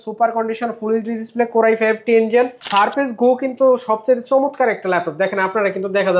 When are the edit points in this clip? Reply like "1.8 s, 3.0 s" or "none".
2.6 s